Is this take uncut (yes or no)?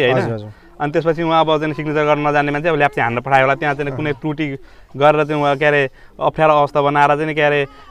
yes